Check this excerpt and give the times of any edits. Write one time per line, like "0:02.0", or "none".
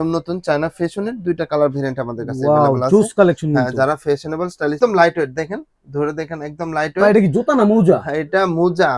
0:04.8